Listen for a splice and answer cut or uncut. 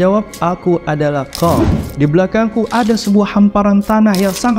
cut